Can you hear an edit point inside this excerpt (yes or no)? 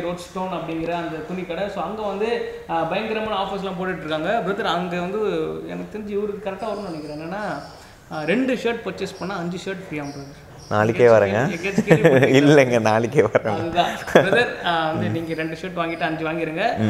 no